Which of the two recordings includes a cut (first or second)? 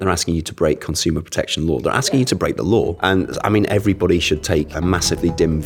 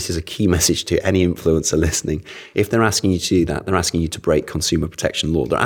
first